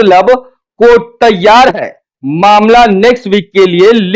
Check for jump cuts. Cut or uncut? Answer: uncut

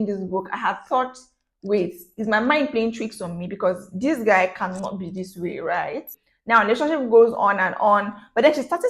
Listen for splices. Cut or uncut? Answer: cut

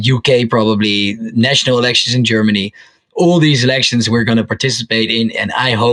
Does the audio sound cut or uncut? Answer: uncut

